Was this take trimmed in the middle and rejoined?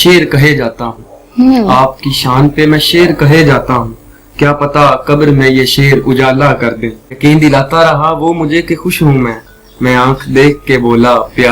yes; 1 cut; at 7.2 s

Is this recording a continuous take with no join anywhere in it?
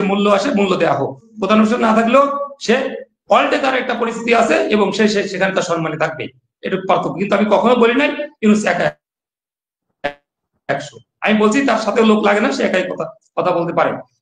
no; 1 cut; at 1.3 s

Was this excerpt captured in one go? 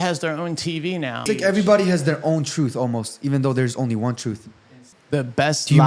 no; 2 cuts; at 1.2 s, 4.9 s

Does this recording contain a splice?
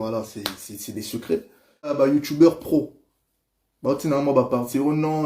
yes; 1 cut; at 2.0 s

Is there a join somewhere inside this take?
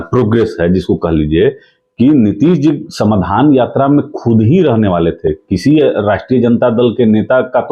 no; 0 cuts

